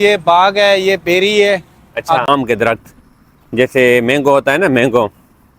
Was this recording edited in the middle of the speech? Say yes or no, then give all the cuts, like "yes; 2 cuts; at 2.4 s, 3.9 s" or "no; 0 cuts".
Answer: yes; 1 cut; at 2.3 s